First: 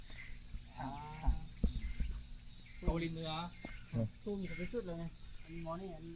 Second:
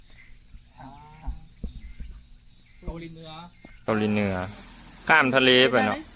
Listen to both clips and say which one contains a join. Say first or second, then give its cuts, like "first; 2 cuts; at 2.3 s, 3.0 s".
second; 1 cut; at 3.7 s